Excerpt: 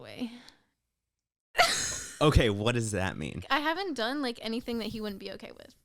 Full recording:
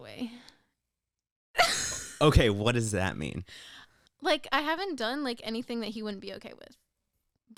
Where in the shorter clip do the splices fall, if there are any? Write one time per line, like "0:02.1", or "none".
0:03.4